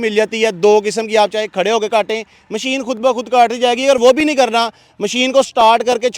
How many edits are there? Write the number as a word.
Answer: zero